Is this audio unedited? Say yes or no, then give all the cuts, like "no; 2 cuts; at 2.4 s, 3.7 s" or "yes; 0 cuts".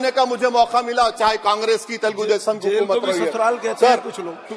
yes; 0 cuts